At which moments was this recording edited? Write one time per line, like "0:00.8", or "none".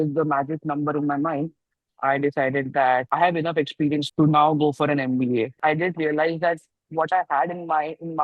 0:03.1
0:04.1
0:05.6